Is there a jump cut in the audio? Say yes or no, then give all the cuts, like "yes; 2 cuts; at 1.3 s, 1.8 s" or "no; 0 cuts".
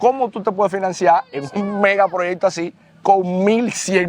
no; 0 cuts